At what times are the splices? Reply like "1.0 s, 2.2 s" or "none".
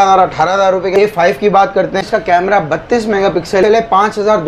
0.9 s, 2.1 s, 3.6 s